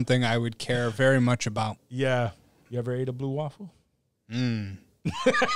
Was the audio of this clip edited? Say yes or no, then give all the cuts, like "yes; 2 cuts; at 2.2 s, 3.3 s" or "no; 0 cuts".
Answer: yes; 1 cut; at 2.7 s